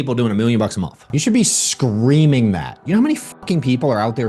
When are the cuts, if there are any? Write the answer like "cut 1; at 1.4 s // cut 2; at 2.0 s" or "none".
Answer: cut 1; at 1.1 s // cut 2; at 2.8 s

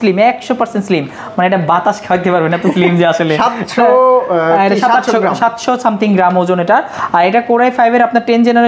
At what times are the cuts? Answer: none

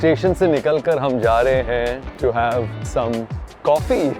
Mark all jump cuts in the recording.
cut 1; at 2.1 s // cut 2; at 2.8 s

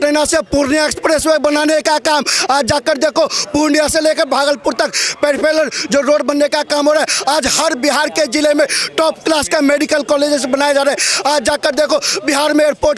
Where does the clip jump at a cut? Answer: none

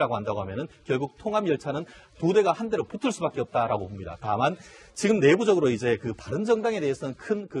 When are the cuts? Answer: cut 1; at 3.9 s

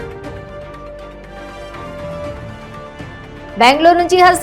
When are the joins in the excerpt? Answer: none

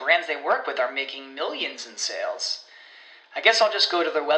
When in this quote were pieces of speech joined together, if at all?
none

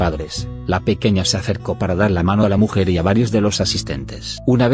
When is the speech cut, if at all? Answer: cut 1; at 3.0 s

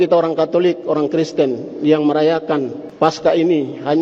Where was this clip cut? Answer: cut 1; at 2.8 s

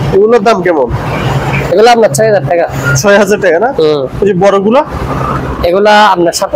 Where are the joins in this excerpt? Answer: none

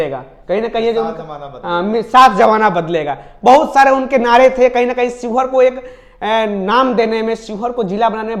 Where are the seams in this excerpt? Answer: none

